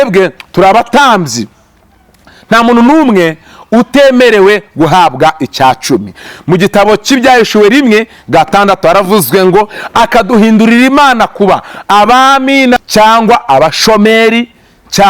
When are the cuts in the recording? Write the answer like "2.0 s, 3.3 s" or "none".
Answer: 12.8 s